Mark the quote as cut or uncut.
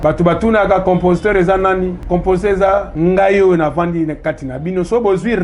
cut